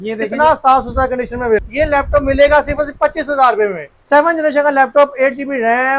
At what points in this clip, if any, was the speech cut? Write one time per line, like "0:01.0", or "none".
0:01.6
0:03.9